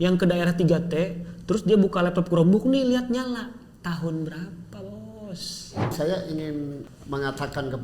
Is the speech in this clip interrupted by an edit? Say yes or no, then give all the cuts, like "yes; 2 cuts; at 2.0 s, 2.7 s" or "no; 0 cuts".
yes; 2 cuts; at 5.9 s, 6.9 s